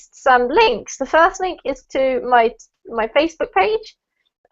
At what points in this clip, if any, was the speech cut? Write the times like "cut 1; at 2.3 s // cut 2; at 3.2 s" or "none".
cut 1; at 3.0 s